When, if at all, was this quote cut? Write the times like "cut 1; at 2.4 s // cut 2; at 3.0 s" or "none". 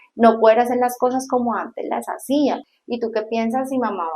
cut 1; at 2.7 s